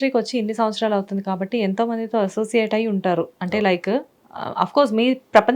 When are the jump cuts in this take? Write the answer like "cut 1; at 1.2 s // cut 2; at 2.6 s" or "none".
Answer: none